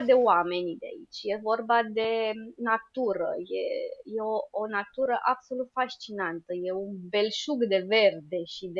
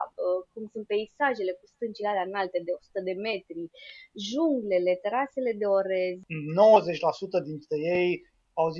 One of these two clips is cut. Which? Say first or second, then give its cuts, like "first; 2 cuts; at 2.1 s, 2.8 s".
second; 1 cut; at 6.3 s